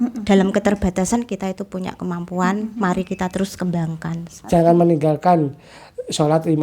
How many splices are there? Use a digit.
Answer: 1